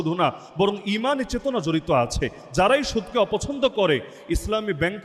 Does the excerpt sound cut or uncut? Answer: uncut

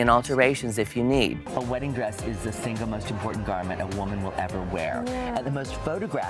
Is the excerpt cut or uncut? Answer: uncut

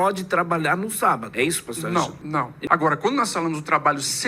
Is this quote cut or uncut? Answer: cut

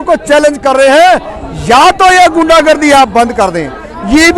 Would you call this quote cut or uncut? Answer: uncut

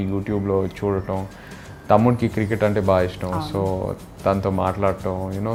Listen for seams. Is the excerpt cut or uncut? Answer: uncut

